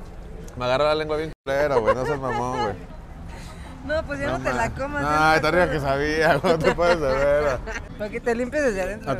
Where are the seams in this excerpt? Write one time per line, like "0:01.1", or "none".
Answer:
0:07.9